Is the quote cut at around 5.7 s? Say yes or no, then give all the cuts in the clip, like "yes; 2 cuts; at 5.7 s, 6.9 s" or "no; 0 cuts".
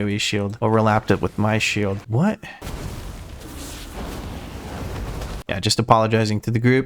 no; 1 cut; at 2.0 s